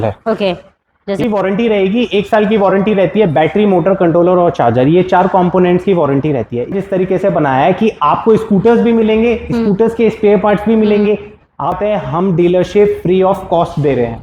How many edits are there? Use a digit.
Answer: 3